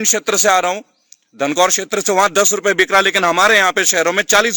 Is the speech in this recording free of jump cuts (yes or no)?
yes